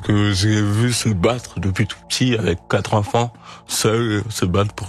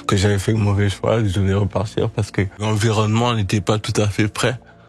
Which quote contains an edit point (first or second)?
second